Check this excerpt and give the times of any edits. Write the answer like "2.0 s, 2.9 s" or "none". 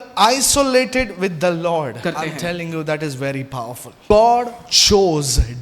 2.0 s, 4.1 s